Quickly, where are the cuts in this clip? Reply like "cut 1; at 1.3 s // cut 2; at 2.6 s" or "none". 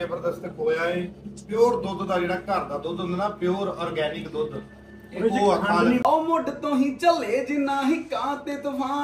cut 1; at 6.0 s